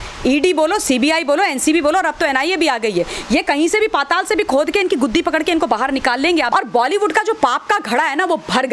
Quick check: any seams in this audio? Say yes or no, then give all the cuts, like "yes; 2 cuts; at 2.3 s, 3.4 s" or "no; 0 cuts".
yes; 1 cut; at 6.5 s